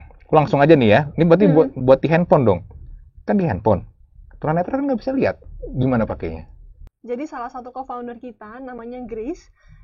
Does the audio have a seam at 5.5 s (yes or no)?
no